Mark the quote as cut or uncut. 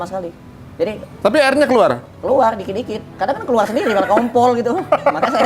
uncut